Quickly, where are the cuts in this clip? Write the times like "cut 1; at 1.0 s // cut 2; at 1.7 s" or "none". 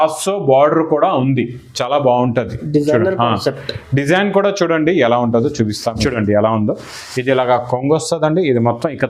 cut 1; at 6.0 s